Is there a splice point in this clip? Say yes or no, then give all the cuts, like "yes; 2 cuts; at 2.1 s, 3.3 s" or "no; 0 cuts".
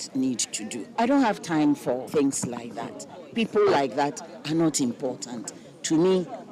yes; 2 cuts; at 1.0 s, 2.1 s